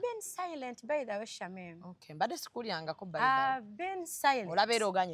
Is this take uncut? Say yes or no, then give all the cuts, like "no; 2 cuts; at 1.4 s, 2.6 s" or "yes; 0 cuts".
yes; 0 cuts